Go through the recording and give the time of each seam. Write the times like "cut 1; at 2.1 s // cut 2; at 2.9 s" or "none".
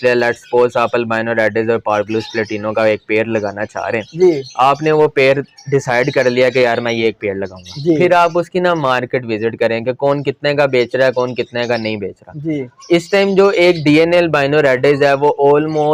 none